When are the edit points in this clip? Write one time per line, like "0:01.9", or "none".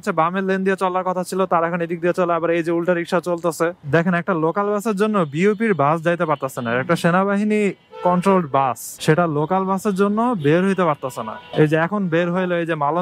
0:03.8